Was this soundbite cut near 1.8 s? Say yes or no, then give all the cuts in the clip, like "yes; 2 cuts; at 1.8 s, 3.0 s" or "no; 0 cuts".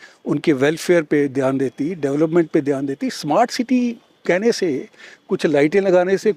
no; 0 cuts